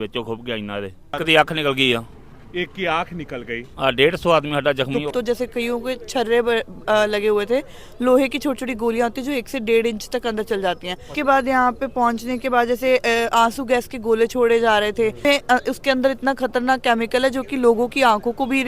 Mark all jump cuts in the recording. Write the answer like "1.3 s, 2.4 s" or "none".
1.2 s, 5.1 s, 11.1 s, 15.2 s